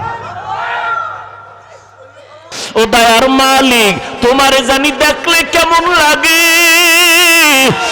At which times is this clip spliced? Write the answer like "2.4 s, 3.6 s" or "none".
2.6 s